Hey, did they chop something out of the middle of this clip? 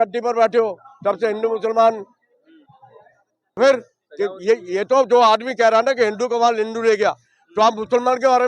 yes; 1 cut; at 3.6 s

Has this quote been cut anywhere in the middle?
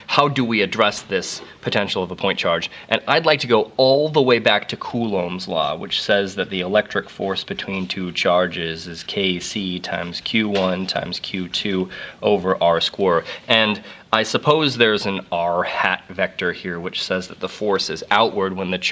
no; 0 cuts

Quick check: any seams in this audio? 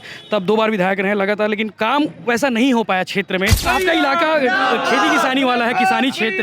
yes; 1 cut; at 3.6 s

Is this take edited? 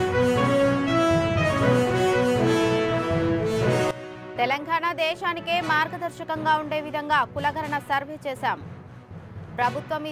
no; 0 cuts

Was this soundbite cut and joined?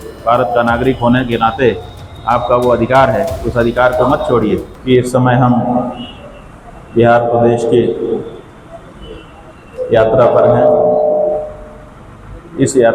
yes; 1 cut; at 4.7 s

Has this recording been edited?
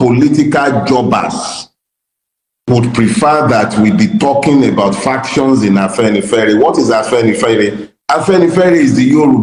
no; 0 cuts

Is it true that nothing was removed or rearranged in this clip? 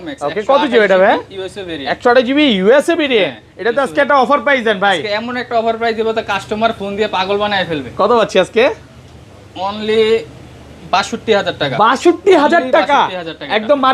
yes; 0 cuts

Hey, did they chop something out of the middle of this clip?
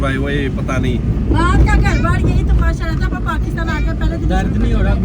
yes; 1 cut; at 1.4 s

